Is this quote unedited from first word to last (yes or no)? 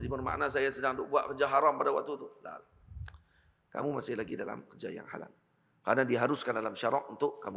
yes